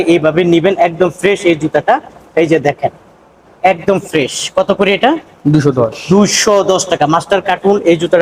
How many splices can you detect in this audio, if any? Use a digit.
0